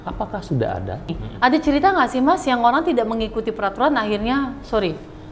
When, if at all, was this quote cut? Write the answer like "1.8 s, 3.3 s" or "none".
1.2 s